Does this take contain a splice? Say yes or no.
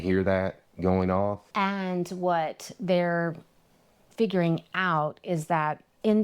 yes